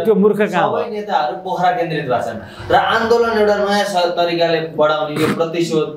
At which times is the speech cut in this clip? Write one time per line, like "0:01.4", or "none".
none